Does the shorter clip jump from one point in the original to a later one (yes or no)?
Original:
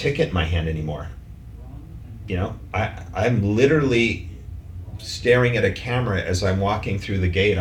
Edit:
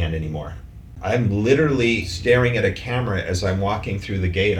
yes